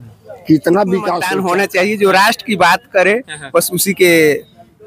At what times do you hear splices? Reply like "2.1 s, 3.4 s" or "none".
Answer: 1.3 s

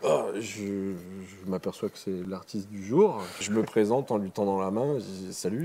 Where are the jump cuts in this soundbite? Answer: 2.2 s, 3.4 s

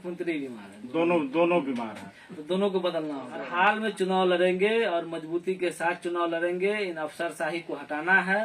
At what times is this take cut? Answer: 3.4 s

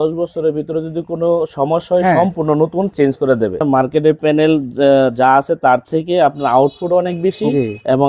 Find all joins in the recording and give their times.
3.6 s

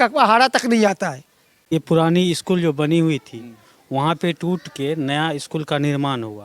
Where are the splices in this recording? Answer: 1.6 s

